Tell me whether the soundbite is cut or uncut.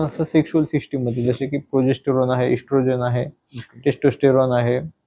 uncut